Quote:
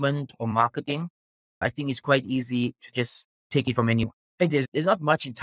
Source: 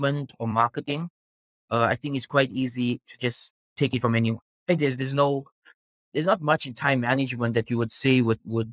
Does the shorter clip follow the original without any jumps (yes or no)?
no